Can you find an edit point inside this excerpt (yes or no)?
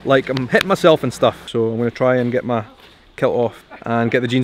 no